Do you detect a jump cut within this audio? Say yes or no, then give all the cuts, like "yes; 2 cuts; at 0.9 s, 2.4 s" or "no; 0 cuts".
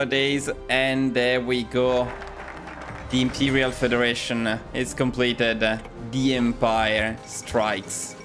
no; 0 cuts